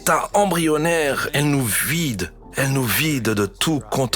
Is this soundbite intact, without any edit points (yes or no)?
no